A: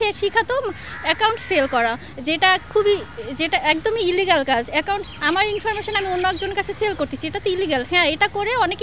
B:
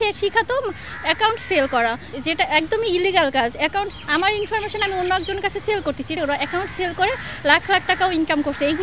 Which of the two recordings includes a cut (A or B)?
B